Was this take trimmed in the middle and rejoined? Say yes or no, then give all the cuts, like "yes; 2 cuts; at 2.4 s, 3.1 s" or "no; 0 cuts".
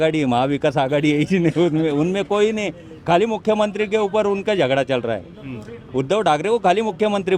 no; 0 cuts